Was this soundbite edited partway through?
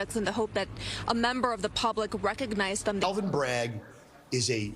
yes; 1 cut; at 3.0 s

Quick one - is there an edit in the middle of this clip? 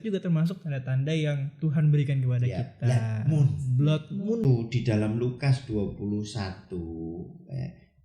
yes; 1 cut; at 4.4 s

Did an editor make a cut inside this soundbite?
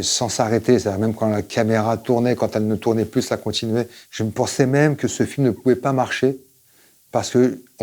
yes; 1 cut; at 4.0 s

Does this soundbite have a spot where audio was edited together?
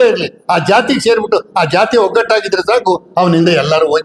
no; 0 cuts

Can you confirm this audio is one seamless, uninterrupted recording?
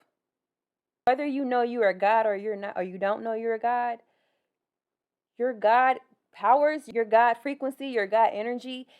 no; 1 cut; at 1.1 s

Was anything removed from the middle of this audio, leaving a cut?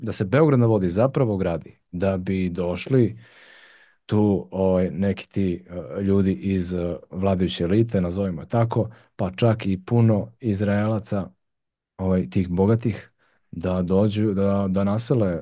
no; 0 cuts

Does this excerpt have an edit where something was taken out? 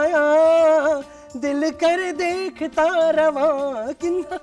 no; 0 cuts

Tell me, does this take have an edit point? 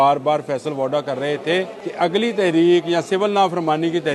yes; 1 cut; at 1.8 s

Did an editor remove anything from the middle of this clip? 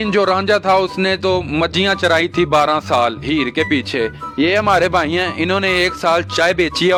no; 0 cuts

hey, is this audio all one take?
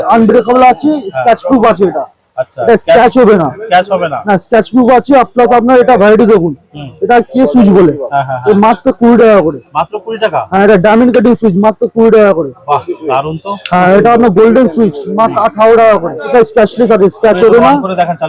no; 1 cut; at 16.3 s

